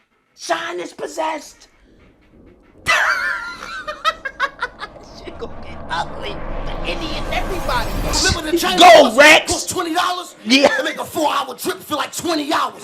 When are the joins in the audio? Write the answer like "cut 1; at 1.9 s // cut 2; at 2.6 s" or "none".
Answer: cut 1; at 8.2 s